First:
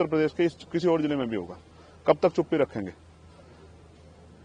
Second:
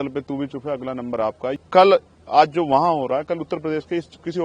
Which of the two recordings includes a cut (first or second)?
second